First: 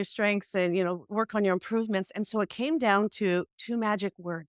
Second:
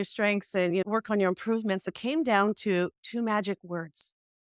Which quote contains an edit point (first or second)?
second